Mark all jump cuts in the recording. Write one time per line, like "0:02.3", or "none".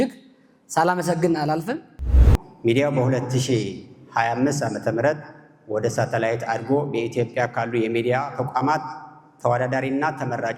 0:02.3

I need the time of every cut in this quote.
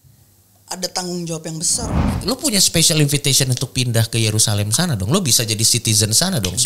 0:02.1

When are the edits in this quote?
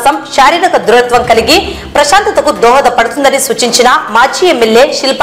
none

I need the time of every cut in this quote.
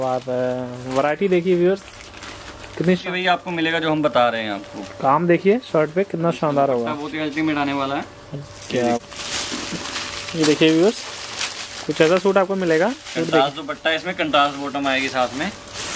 0:03.0
0:09.0

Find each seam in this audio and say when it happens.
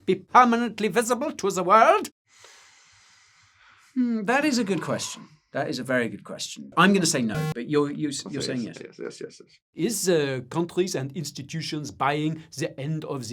0:02.2
0:06.7
0:09.5

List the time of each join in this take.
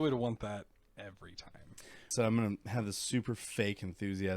0:02.1

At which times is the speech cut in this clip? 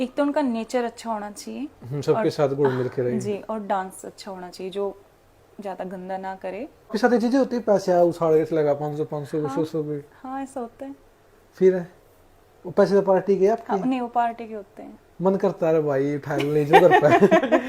0:06.9

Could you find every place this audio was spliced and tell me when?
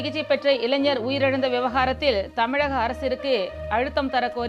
none

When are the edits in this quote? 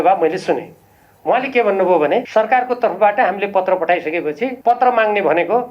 0:02.3
0:04.6

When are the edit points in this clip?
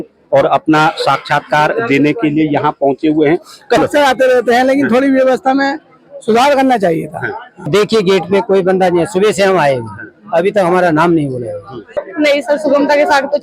0:03.8
0:07.7
0:12.0

